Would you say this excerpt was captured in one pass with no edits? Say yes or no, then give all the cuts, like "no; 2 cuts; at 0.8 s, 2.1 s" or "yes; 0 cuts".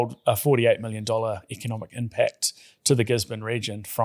yes; 0 cuts